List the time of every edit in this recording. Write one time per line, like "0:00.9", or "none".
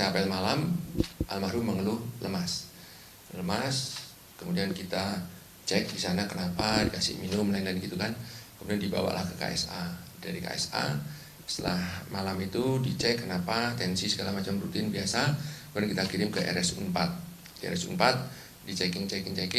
0:10.5

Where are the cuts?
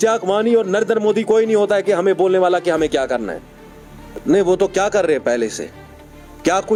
none

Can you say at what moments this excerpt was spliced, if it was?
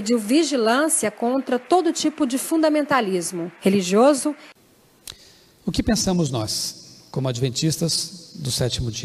0:04.5

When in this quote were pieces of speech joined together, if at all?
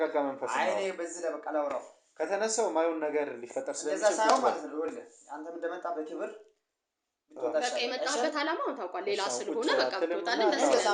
none

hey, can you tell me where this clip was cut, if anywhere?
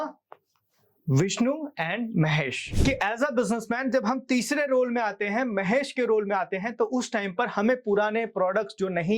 0:02.6

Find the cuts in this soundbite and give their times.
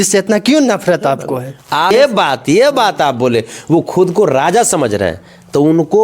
0:01.9

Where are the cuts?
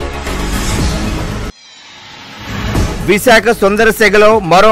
0:01.1
0:02.7

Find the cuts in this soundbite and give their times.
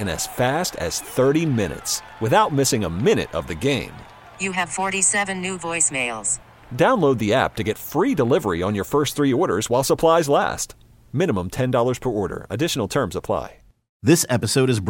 0:13.8

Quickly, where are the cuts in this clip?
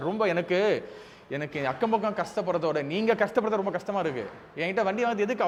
none

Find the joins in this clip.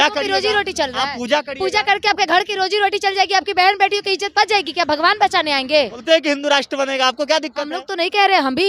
0:06.0

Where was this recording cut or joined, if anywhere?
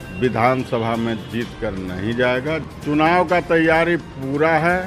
0:02.7

